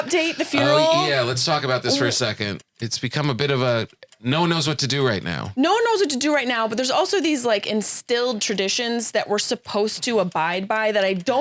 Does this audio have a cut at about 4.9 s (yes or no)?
no